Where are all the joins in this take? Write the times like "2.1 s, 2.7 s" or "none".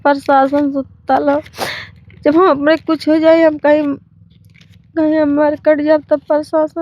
none